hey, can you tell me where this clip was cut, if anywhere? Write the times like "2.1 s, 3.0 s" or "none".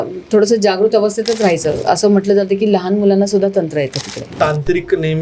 1.8 s, 4.3 s